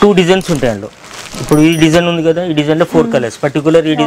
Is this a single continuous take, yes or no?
yes